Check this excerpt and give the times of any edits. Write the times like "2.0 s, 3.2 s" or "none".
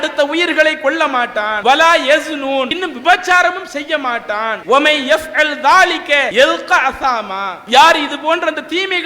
1.5 s, 2.8 s, 4.6 s, 6.3 s